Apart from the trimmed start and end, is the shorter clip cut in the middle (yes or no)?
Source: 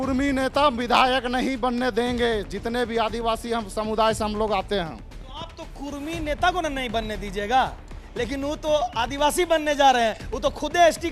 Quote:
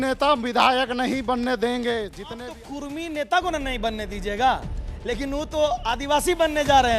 yes